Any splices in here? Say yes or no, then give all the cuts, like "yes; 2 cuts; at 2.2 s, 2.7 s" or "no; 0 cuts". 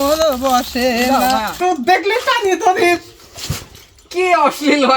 yes; 1 cut; at 1.5 s